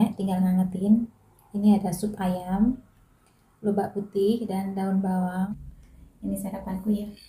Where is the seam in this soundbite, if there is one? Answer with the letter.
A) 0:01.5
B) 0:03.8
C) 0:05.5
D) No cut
C